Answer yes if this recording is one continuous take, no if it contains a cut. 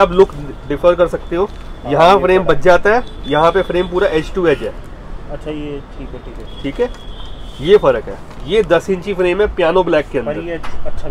yes